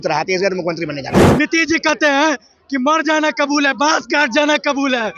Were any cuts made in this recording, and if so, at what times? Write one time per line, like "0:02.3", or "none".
0:01.2